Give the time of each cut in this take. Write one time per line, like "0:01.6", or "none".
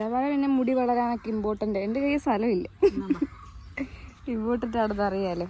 none